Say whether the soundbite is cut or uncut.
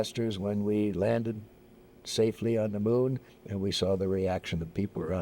uncut